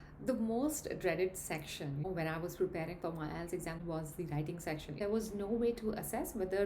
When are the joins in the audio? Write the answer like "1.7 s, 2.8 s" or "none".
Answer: 2.0 s, 3.8 s, 5.0 s